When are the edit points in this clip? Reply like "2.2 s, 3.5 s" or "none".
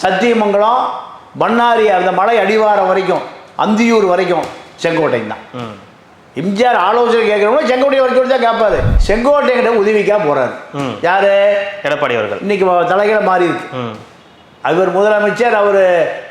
8.9 s